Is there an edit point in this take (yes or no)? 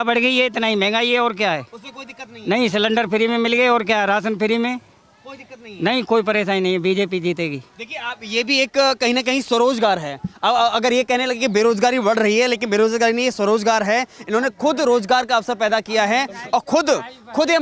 no